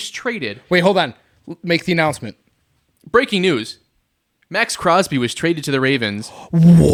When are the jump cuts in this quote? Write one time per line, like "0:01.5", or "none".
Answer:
none